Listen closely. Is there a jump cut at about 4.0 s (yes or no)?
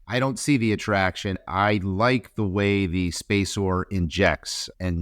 no